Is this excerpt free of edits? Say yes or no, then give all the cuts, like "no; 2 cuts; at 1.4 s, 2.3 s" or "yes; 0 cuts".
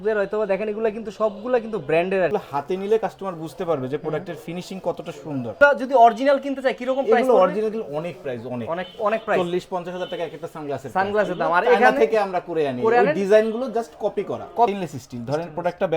no; 3 cuts; at 2.3 s, 5.6 s, 14.7 s